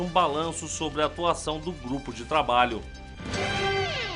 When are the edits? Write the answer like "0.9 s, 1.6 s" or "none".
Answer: 3.2 s